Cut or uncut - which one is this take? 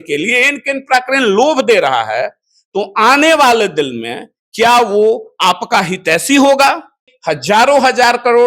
cut